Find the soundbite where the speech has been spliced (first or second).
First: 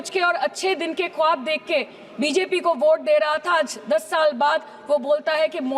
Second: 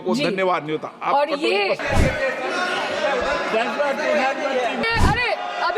second